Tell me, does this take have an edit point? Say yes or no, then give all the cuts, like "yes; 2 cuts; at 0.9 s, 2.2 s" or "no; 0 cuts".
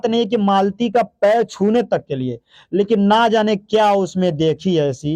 no; 0 cuts